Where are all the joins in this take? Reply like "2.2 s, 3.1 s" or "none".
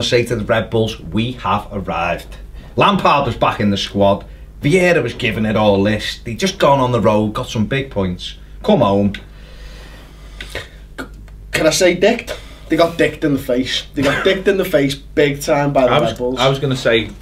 none

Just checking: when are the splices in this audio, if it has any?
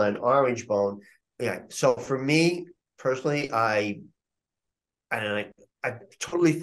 1.1 s

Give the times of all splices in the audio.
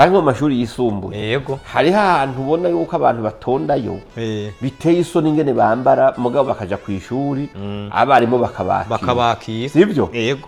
none

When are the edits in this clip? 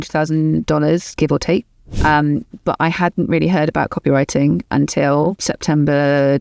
1.9 s

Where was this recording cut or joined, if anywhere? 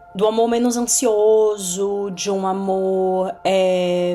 none

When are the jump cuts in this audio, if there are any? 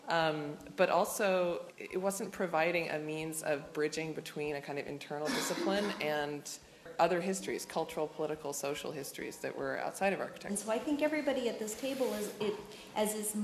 1.7 s, 6.9 s, 10.5 s

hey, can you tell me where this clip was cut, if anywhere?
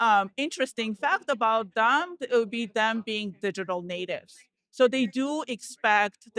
none

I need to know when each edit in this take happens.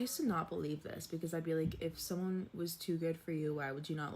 1.0 s

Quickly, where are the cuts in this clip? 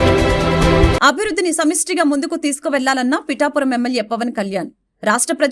1.0 s

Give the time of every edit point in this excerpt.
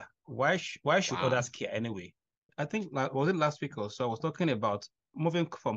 2.6 s

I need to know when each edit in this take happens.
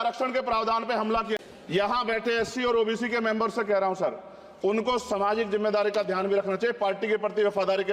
1.4 s

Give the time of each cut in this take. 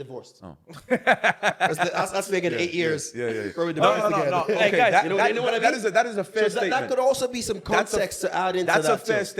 none

